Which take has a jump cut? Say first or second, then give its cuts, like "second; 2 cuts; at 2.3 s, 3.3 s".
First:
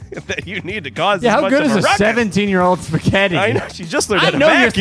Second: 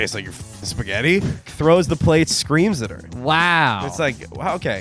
second; 1 cut; at 1.5 s